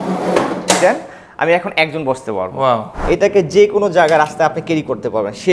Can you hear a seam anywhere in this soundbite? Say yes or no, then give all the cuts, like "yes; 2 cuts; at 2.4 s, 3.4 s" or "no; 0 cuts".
yes; 1 cut; at 2.9 s